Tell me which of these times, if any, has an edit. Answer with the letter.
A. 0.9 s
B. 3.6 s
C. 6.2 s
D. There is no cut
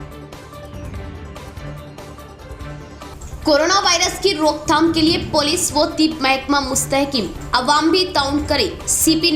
A